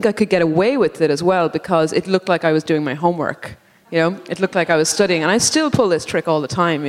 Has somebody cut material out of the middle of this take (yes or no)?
no